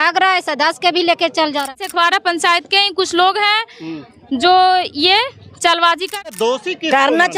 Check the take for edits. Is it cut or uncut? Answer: cut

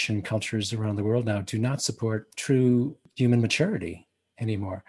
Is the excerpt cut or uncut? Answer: cut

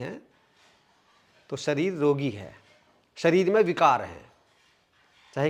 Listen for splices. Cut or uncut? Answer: uncut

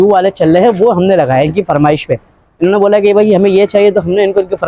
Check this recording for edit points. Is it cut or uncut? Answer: uncut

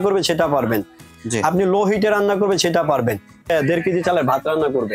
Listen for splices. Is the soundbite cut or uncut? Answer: cut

